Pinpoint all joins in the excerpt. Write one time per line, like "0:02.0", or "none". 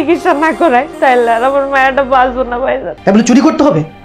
0:00.9
0:02.9